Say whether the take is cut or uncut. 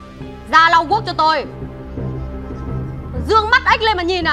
cut